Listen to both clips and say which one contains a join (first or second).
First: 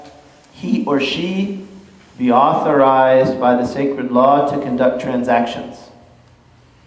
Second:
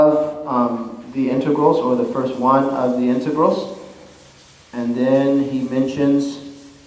second